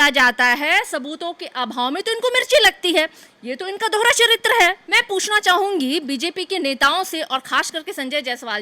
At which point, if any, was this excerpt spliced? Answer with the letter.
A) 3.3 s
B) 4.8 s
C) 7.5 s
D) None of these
B